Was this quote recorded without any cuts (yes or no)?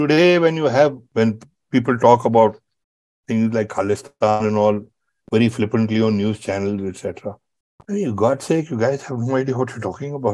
no